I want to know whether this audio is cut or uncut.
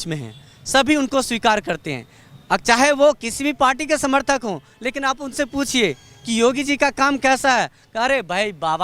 uncut